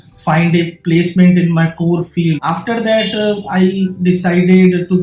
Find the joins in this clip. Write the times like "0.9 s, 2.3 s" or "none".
2.4 s